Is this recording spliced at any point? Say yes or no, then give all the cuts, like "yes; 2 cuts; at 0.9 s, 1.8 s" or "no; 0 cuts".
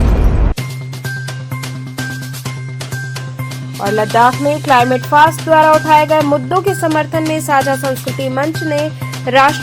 yes; 1 cut; at 1.1 s